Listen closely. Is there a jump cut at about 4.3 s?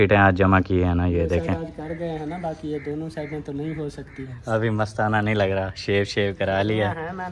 yes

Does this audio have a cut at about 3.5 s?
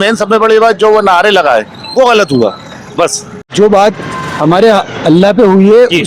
yes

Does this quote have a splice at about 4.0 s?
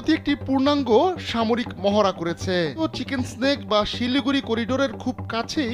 no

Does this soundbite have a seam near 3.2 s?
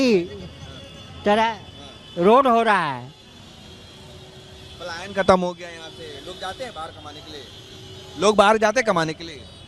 no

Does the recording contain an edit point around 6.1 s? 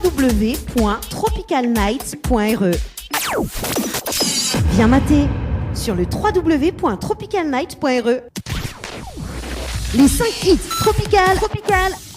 no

